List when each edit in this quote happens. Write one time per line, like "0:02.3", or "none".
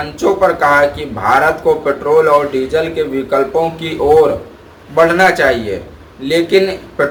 none